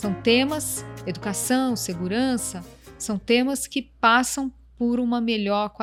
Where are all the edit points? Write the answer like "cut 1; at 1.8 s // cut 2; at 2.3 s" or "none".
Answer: none